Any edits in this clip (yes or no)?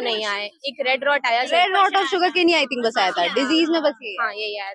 no